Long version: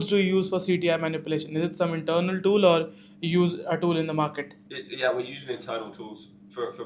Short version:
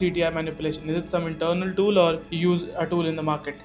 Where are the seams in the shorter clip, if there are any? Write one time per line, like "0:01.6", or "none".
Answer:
0:02.3

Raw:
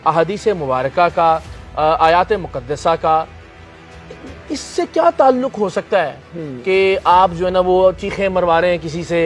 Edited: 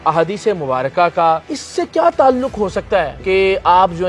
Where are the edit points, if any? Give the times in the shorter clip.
0:01.6
0:03.2

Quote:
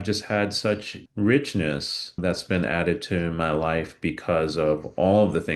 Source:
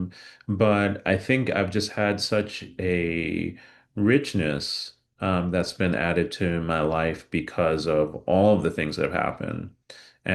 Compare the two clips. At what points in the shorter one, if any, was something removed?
0:01.0
0:02.2

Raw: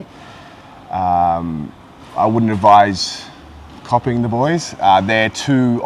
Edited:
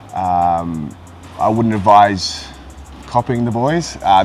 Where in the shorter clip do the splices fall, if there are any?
none

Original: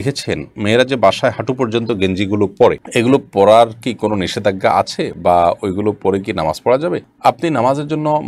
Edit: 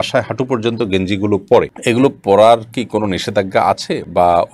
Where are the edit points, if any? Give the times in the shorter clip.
none

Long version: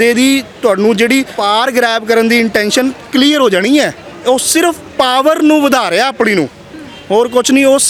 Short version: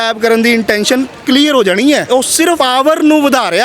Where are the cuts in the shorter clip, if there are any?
0:02.4

